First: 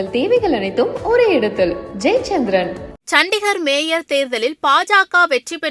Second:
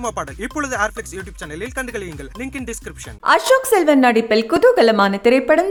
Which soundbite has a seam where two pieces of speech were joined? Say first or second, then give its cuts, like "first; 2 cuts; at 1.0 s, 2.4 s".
first; 1 cut; at 2.9 s